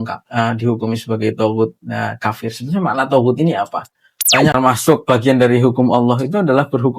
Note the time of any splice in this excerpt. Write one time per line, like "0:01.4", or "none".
0:04.5

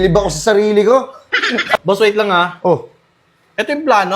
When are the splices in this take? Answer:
0:01.7

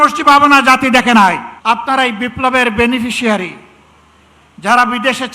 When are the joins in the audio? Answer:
0:01.5

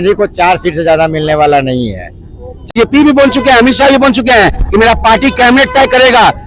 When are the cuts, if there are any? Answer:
0:02.7

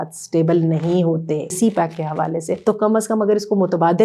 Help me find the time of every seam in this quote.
0:01.6
0:02.6

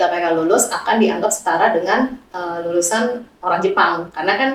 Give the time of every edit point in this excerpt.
none

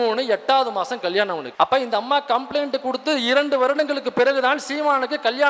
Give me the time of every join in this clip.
0:01.5

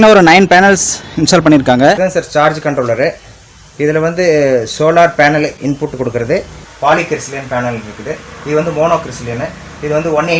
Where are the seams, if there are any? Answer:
0:01.9
0:06.6

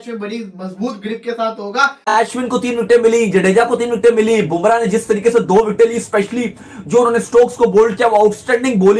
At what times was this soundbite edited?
0:02.0

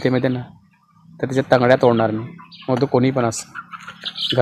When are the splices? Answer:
none

